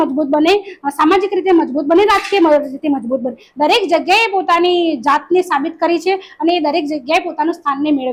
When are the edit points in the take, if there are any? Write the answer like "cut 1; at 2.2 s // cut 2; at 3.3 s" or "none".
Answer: none